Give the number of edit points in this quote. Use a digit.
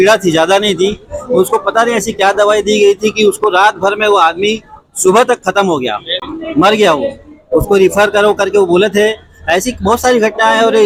0